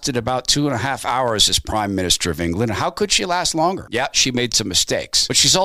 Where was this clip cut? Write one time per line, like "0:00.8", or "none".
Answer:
none